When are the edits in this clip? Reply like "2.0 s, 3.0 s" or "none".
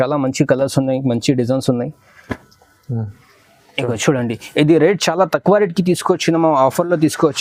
none